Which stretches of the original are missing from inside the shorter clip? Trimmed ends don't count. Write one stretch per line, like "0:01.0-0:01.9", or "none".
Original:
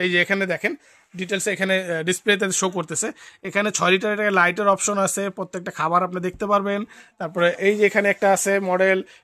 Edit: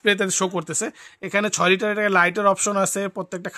none